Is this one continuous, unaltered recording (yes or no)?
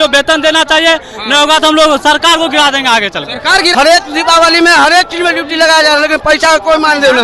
no